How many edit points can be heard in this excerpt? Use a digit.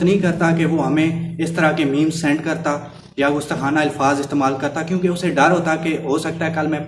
0